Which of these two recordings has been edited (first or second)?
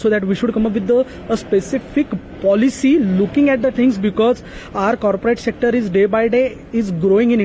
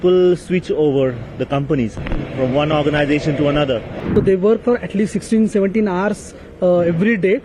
second